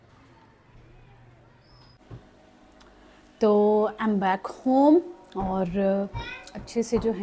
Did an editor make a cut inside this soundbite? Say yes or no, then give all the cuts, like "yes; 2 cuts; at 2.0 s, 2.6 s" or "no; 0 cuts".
yes; 1 cut; at 2.0 s